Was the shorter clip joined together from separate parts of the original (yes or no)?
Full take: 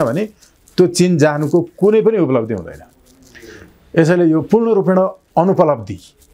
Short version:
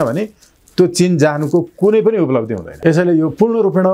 yes